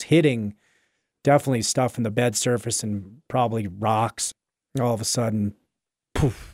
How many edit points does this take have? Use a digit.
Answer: 1